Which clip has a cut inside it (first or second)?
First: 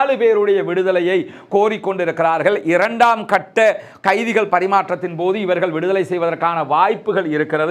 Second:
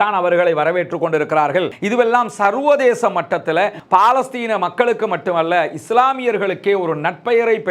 second